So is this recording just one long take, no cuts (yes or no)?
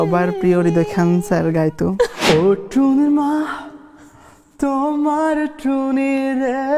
no